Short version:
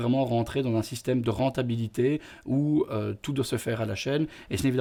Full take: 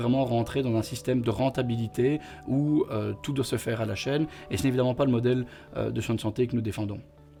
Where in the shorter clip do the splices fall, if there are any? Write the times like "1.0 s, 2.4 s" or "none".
none